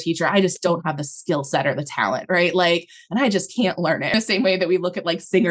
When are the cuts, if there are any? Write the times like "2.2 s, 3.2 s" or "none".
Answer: 4.1 s